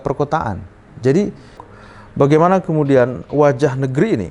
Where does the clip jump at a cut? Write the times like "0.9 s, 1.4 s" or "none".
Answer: 1.7 s